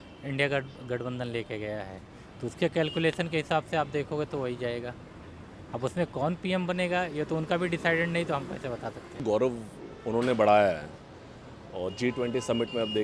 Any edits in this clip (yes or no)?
yes